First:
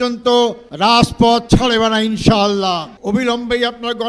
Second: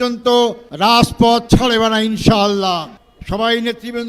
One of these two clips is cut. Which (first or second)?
second